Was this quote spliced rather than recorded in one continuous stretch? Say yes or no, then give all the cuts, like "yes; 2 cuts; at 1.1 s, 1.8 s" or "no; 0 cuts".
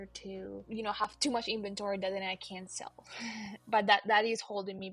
no; 0 cuts